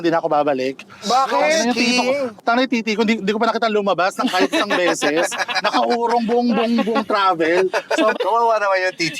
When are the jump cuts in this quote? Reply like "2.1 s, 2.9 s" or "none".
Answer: 2.3 s, 8.1 s